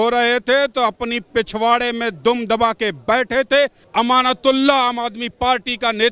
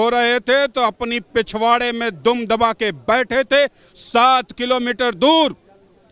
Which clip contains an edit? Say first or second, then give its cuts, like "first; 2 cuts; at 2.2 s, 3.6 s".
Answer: first; 1 cut; at 3.8 s